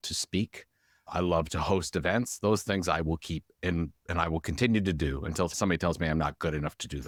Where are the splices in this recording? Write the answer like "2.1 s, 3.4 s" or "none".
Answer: none